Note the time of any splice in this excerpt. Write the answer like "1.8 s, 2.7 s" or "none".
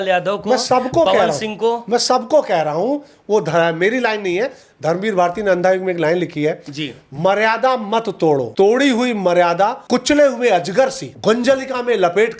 8.5 s, 9.8 s, 11.1 s

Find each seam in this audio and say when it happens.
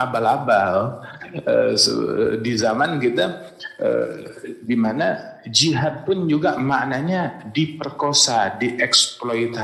none

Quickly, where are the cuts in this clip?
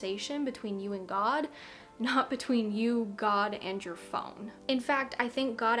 4.5 s

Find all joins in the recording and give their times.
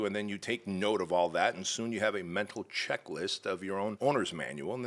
4.0 s

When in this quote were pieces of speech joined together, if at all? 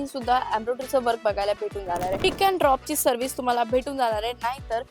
2.2 s

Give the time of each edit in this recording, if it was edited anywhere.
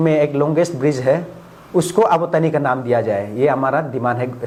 none

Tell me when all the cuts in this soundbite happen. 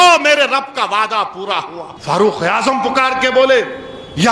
1.9 s

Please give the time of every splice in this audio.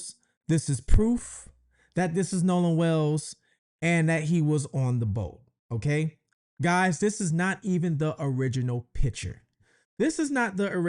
none

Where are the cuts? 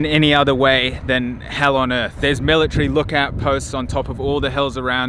2.1 s

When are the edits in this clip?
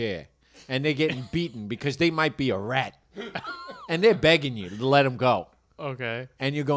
none

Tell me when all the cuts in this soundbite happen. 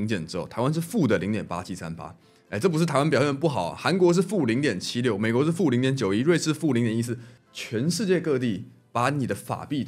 none

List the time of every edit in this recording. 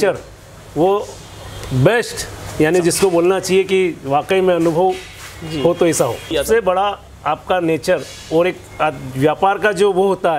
6.3 s

